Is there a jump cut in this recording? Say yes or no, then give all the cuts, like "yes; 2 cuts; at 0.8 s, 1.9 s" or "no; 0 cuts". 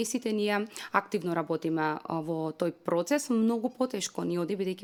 no; 0 cuts